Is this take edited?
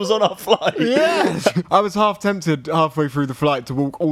yes; 1 cut; at 1.6 s

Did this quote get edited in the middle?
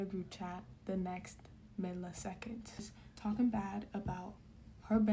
yes; 1 cut; at 3.0 s

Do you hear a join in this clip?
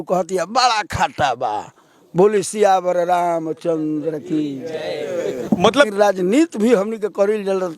yes; 1 cut; at 5.9 s

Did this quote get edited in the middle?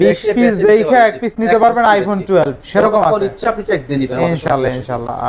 no; 0 cuts

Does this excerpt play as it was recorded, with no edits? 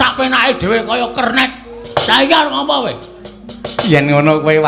no; 1 cut; at 1.8 s

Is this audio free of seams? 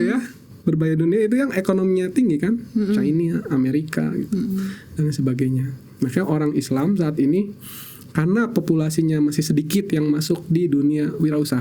yes; 0 cuts

